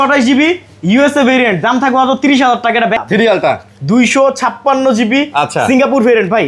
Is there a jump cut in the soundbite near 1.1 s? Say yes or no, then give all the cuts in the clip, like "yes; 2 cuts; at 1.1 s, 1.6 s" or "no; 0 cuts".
no; 1 cut; at 3.0 s